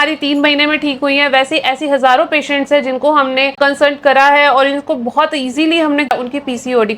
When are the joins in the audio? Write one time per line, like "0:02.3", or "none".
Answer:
0:03.5
0:06.1